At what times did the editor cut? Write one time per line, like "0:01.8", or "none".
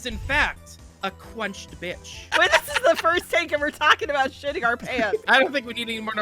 0:02.1
0:05.2